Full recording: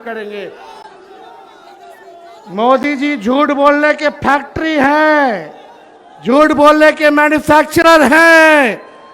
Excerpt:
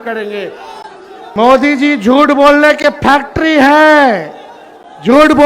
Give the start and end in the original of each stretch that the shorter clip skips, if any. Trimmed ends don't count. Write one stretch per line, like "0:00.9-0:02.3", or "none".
0:01.1-0:02.3